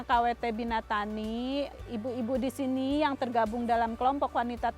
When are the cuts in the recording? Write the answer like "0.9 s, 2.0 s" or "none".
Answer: 1.8 s